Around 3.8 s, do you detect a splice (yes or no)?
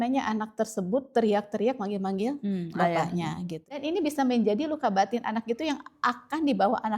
yes